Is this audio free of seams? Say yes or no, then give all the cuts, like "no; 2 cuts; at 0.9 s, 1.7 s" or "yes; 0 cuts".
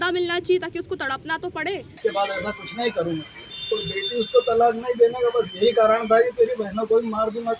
no; 1 cut; at 2.0 s